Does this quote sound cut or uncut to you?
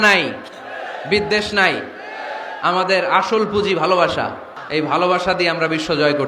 cut